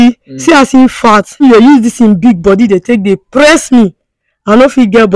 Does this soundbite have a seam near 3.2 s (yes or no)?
no